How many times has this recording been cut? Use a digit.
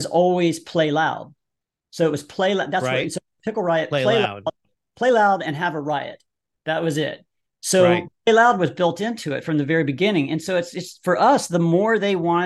0